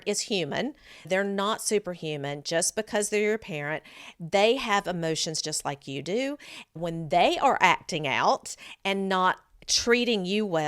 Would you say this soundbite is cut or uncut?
cut